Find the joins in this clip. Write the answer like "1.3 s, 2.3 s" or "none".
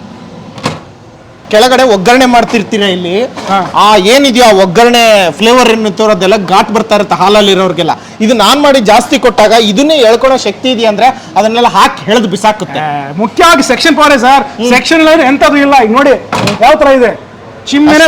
1.3 s